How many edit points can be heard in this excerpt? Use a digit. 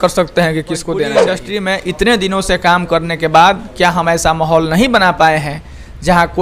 1